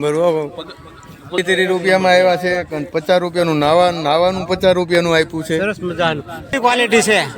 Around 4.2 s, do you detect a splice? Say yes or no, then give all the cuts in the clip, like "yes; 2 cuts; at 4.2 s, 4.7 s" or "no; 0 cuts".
no; 2 cuts; at 1.4 s, 6.6 s